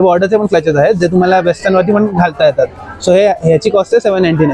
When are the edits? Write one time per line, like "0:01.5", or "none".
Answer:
none